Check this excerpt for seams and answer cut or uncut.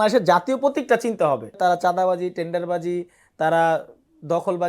cut